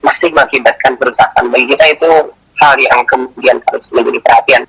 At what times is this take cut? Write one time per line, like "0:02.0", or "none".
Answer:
0:02.4

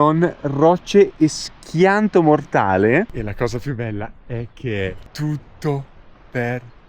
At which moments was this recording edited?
0:03.2
0:05.1

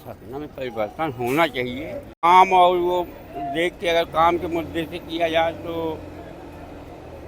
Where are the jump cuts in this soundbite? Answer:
0:02.2

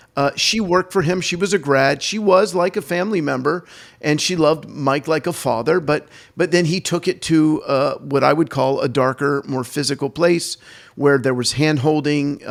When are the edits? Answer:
none

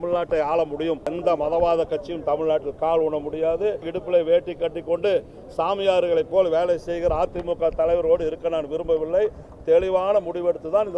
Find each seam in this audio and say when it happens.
0:01.1
0:03.9

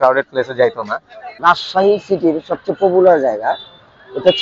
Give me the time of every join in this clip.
0:01.2

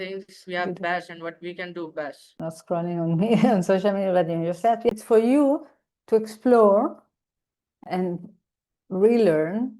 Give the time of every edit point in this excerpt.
0:02.4
0:04.9
0:07.8

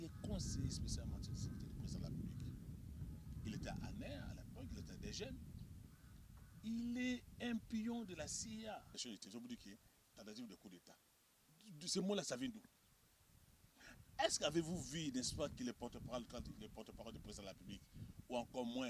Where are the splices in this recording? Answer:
0:09.0

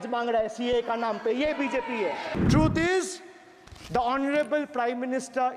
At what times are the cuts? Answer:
0:02.3

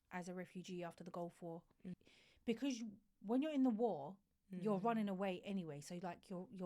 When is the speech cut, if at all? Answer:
0:02.0

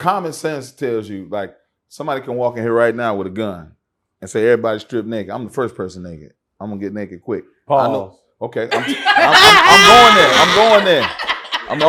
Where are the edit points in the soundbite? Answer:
none

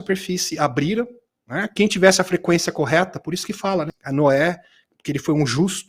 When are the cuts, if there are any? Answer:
0:04.0

